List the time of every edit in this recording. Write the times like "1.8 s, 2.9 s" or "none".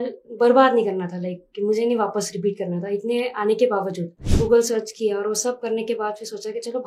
4.2 s